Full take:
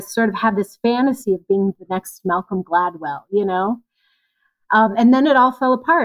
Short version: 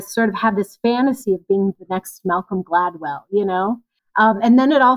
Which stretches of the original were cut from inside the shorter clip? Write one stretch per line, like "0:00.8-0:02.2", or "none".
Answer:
0:03.9-0:04.5

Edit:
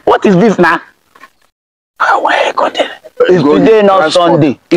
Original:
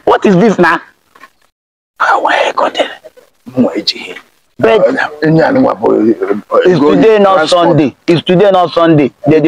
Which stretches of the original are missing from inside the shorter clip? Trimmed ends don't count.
0:03.2-0:06.6

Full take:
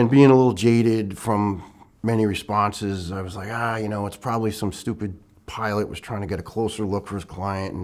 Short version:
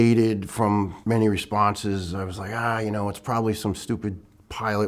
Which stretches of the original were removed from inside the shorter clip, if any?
0:01.6-0:01.9

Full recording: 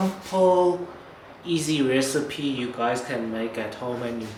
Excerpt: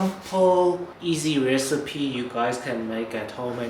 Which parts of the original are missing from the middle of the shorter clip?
0:00.9-0:01.3

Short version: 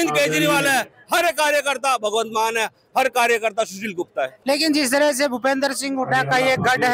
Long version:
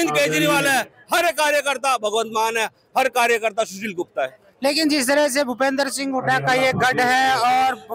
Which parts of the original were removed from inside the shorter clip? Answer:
0:04.3-0:04.5

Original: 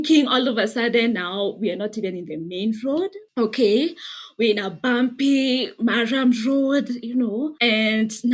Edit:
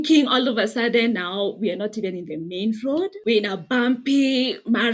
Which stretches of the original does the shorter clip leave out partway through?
0:03.2-0:04.3

